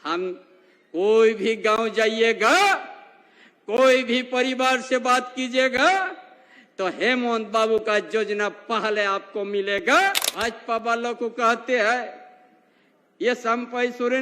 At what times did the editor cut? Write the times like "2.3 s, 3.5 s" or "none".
10.3 s